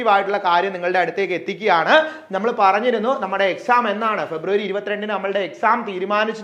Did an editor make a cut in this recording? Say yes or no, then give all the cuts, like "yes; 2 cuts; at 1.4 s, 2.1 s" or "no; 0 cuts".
no; 0 cuts